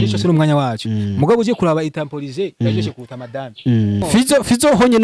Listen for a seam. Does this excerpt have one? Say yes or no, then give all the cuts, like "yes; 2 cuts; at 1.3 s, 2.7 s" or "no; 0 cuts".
yes; 1 cut; at 4.0 s